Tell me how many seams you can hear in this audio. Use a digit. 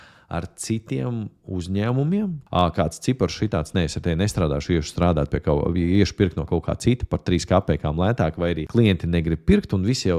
2